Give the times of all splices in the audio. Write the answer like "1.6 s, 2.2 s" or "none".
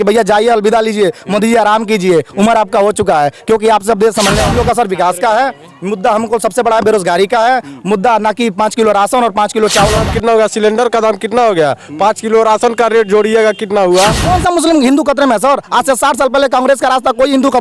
4.4 s, 10.0 s, 14.2 s